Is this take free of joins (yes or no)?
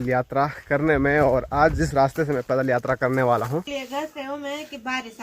no